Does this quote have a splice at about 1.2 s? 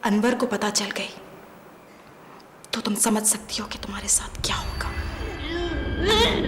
no; 0 cuts

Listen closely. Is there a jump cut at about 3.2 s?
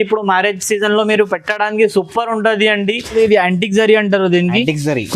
yes; 1 cut; at 3.2 s

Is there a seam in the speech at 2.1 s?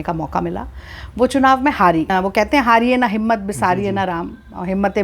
yes; 1 cut; at 2.1 s

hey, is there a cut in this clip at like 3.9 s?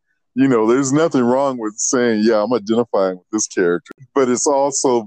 yes; 1 cut; at 3.9 s

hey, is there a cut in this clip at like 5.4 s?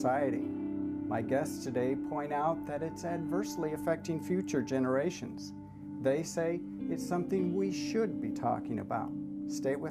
yes; 1 cut; at 5.4 s

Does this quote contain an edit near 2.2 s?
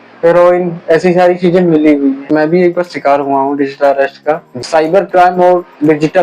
yes; 2 cuts; at 2.2 s, 4.6 s

